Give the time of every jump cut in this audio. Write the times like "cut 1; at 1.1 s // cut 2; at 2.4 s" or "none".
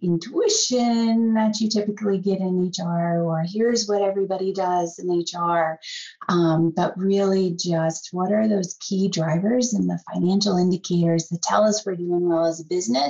none